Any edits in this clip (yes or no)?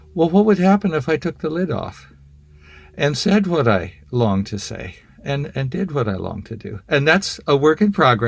no